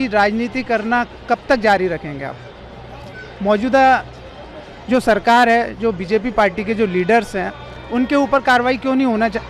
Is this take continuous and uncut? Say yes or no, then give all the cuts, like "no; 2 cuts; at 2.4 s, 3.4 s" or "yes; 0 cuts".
yes; 0 cuts